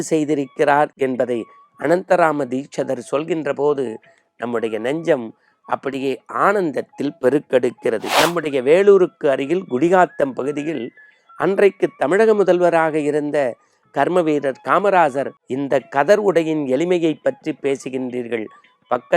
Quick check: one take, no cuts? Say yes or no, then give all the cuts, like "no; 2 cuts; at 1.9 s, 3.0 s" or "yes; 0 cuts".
no; 2 cuts; at 8.1 s, 15.4 s